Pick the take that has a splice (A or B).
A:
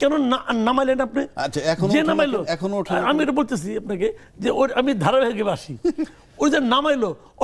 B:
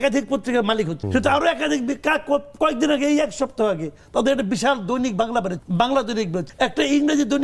B